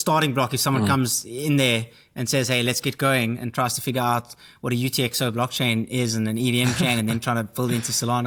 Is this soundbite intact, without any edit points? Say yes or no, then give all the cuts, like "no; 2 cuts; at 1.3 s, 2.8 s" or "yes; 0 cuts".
yes; 0 cuts